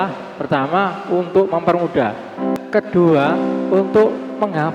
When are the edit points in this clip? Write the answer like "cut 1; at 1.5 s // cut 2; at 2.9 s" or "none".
cut 1; at 2.6 s